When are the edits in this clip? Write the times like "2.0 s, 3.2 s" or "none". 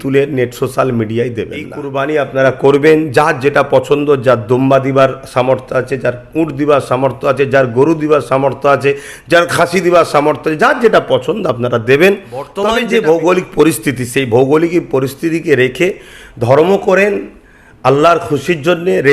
1.8 s, 12.5 s